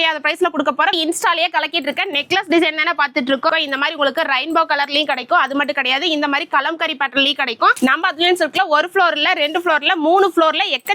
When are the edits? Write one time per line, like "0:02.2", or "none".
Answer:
0:01.0
0:03.7
0:07.7